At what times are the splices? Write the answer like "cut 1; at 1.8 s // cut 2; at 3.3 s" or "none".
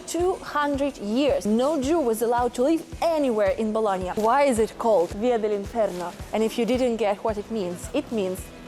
cut 1; at 1.4 s // cut 2; at 4.1 s // cut 3; at 5.1 s